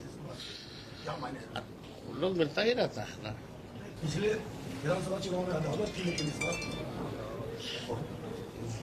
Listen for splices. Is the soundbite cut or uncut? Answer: cut